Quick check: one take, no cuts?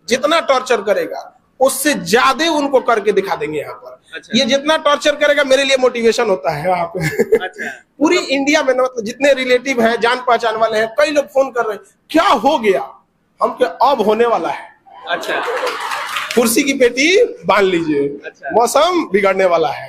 yes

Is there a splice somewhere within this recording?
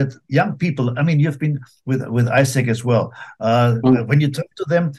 no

